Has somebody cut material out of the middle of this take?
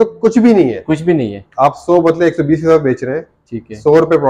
no; 0 cuts

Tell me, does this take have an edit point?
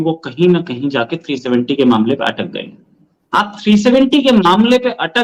no; 0 cuts

